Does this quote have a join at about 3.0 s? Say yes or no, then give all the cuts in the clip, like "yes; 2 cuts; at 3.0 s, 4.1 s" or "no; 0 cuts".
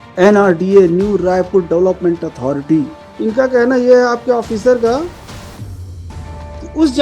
yes; 1 cut; at 3.0 s